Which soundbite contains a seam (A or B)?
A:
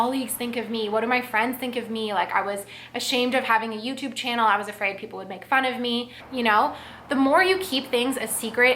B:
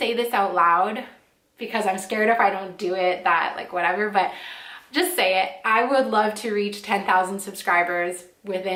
A